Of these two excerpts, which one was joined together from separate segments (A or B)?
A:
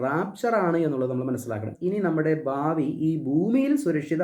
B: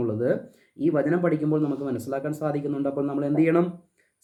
A